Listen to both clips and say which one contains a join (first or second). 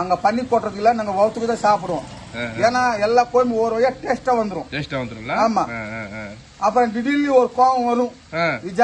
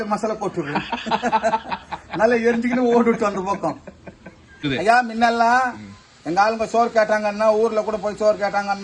second